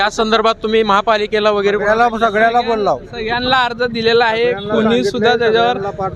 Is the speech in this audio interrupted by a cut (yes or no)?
no